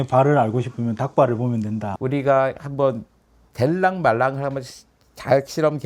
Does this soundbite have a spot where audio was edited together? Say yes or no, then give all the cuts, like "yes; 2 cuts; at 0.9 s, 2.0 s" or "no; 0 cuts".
yes; 1 cut; at 1.9 s